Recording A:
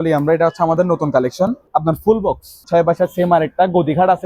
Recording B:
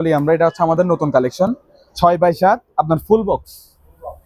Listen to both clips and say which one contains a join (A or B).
A